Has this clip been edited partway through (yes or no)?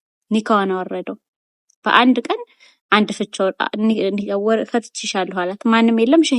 no